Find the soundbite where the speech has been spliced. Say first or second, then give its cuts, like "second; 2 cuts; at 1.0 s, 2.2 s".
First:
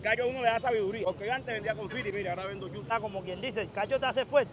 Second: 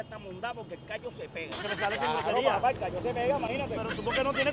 first; 2 cuts; at 1.0 s, 2.9 s